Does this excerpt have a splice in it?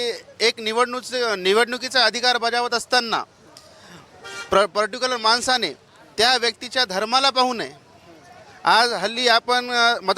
no; 0 cuts

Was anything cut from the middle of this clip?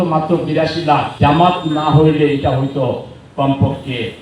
yes; 1 cut; at 1.1 s

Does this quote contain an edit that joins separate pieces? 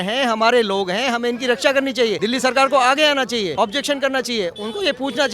yes; 2 cuts; at 2.2 s, 3.5 s

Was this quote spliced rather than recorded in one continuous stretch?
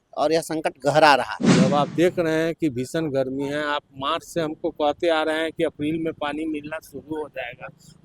yes; 1 cut; at 1.4 s

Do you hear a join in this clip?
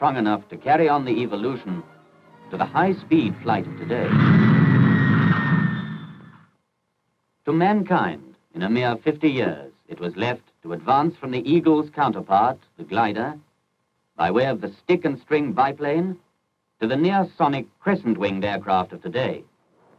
yes; 1 cut; at 16.7 s

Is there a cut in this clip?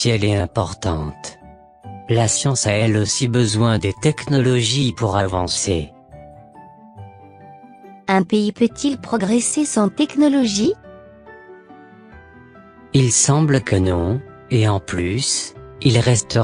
no; 0 cuts

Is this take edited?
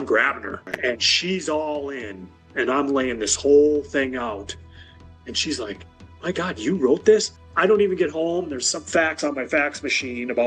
yes; 1 cut; at 7.3 s

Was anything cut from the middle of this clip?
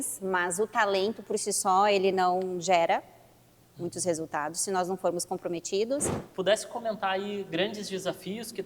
yes; 1 cut; at 6.2 s

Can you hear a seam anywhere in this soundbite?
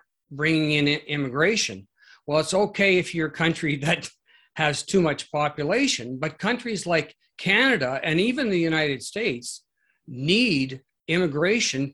no; 0 cuts

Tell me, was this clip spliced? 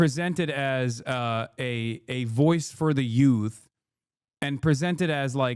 no; 0 cuts

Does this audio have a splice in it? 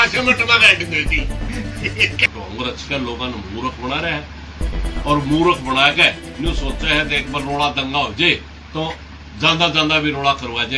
yes; 1 cut; at 2.2 s

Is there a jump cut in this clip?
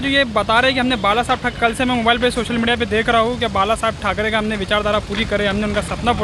no; 0 cuts

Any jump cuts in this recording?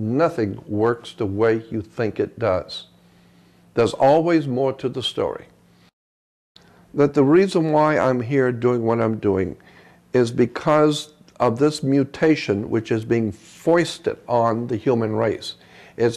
yes; 1 cut; at 6.3 s

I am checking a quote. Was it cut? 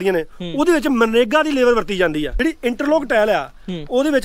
yes; 1 cut; at 2.3 s

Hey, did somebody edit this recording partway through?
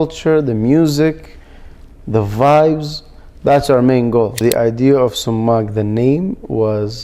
yes; 1 cut; at 4.4 s

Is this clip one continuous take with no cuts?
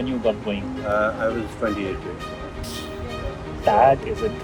yes; 0 cuts

